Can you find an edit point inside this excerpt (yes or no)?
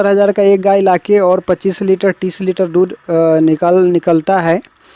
no